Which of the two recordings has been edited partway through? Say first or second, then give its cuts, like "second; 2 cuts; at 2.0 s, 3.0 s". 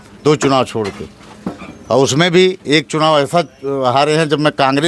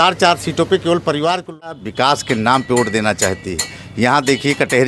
second; 1 cut; at 1.8 s